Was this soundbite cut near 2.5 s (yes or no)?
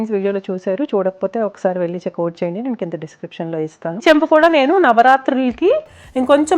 no